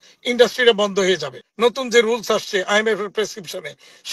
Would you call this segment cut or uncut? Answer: cut